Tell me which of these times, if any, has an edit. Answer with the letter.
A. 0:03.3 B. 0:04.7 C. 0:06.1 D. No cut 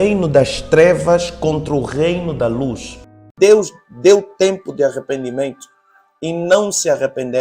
A